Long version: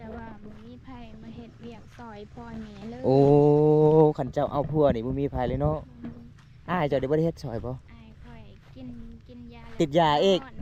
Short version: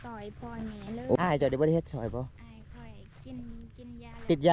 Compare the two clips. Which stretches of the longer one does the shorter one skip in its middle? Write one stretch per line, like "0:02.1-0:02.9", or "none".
0:03.1-0:06.7